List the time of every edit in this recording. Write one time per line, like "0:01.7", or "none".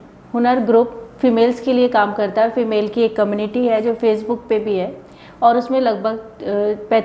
none